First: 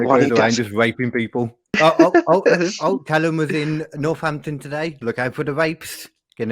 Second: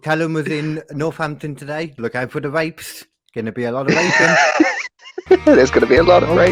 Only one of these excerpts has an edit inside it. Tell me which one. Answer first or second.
first